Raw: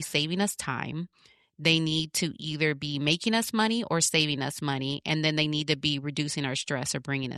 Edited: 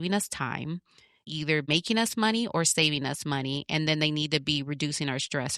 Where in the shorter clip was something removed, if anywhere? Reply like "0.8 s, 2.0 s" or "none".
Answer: 1.4 s